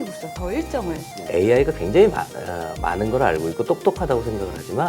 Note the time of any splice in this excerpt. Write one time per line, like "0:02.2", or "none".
0:01.3